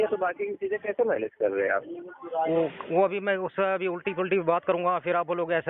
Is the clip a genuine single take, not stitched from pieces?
yes; 0 cuts

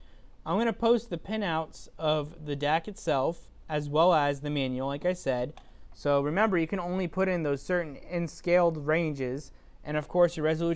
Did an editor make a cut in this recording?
no; 0 cuts

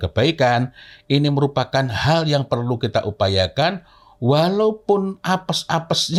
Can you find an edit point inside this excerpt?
no; 0 cuts

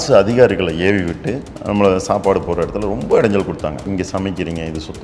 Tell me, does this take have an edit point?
yes; 1 cut; at 3.8 s

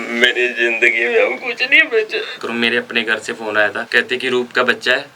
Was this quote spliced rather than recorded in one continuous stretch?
yes; 2 cuts; at 2.4 s, 3.8 s

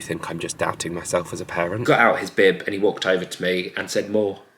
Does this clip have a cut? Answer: yes; 1 cut; at 1.8 s

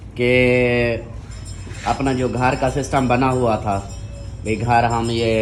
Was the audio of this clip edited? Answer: no; 0 cuts

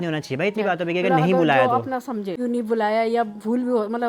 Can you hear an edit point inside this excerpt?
yes; 1 cut; at 2.3 s

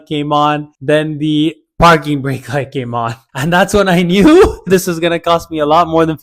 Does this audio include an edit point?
yes; 1 cut; at 4.7 s

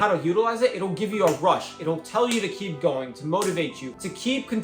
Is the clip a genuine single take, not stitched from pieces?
yes; 0 cuts

